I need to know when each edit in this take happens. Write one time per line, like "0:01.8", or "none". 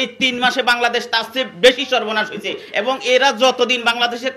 none